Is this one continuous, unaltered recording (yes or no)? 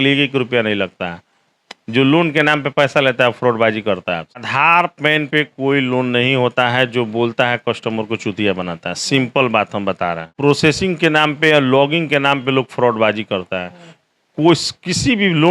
no